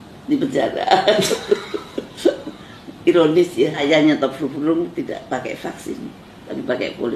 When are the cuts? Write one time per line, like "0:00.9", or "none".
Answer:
0:03.8